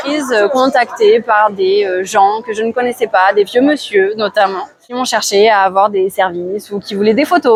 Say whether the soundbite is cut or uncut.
uncut